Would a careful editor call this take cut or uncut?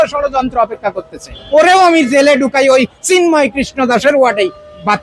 cut